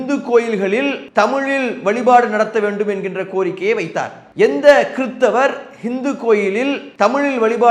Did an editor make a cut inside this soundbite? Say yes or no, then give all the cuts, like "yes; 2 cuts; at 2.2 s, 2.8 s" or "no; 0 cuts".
yes; 2 cuts; at 1.0 s, 6.8 s